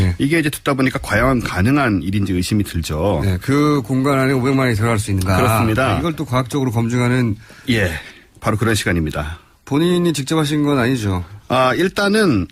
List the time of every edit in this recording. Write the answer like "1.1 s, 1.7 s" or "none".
6.0 s